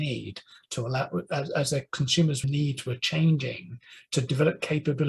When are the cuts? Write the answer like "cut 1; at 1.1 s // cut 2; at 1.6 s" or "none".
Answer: none